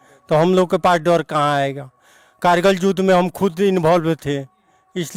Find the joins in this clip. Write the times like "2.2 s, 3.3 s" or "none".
none